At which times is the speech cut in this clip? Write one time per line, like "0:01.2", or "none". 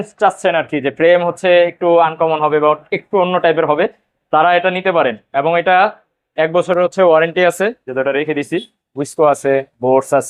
0:08.3